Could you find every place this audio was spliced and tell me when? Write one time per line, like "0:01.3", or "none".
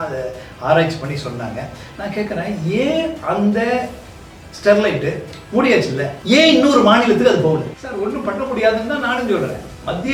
0:06.1
0:07.7